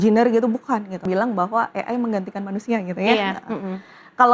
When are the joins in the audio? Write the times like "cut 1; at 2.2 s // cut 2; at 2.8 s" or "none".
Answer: cut 1; at 1.0 s